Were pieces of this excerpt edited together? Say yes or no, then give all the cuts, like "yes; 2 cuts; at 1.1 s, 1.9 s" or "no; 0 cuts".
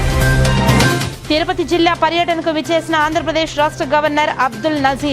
yes; 1 cut; at 1.1 s